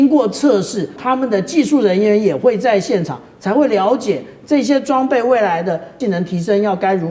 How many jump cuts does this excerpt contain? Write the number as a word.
two